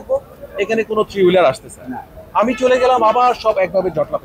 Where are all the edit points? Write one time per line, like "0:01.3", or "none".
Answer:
none